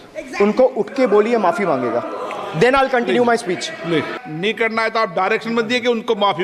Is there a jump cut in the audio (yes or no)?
yes